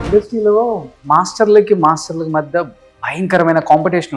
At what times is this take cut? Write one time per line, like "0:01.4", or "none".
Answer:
none